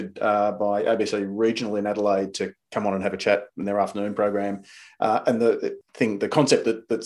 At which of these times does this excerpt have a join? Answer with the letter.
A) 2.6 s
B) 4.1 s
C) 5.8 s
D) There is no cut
C